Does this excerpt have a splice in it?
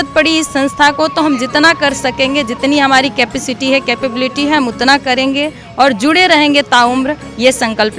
no; 0 cuts

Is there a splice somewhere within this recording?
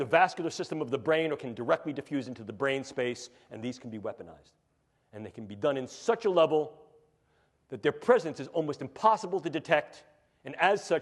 no; 0 cuts

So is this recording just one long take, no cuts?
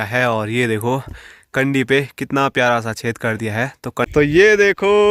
no; 1 cut; at 4.0 s

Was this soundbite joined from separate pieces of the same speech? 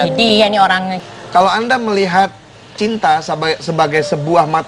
yes; 1 cut; at 1.0 s

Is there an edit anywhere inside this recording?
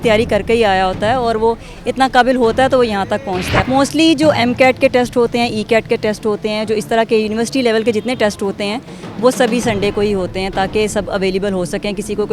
yes; 1 cut; at 3.5 s

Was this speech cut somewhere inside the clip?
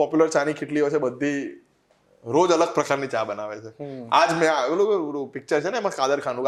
no; 0 cuts

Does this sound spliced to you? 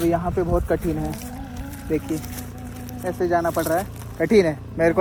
no; 0 cuts

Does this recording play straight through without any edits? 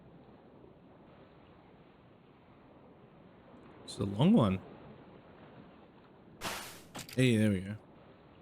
no; 1 cut; at 2.2 s

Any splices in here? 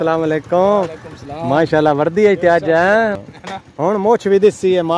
yes; 1 cut; at 3.2 s

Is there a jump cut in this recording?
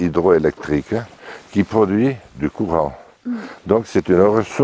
yes; 1 cut; at 1.1 s

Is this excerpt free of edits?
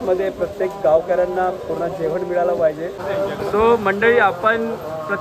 no; 1 cut; at 3.0 s

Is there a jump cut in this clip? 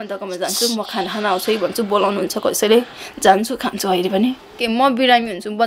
yes; 1 cut; at 4.6 s

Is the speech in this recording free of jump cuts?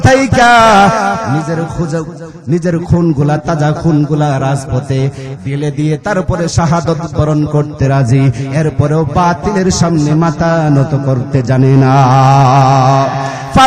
yes; 0 cuts

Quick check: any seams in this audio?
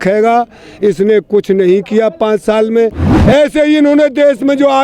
yes; 1 cut; at 3.1 s

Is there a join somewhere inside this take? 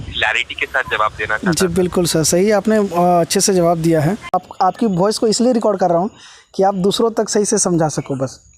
yes; 1 cut; at 4.3 s

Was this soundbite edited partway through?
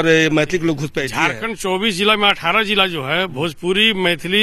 yes; 1 cut; at 1.0 s

